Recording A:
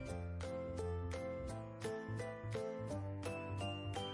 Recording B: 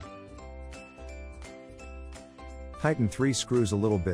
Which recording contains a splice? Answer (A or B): B